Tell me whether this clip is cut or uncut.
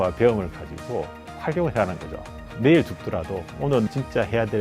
cut